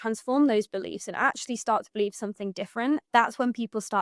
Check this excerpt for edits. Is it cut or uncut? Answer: cut